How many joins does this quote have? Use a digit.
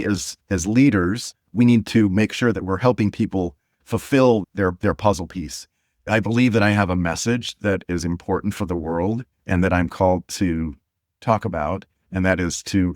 2